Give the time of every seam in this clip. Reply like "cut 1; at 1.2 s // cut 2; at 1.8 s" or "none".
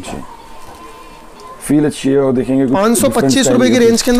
none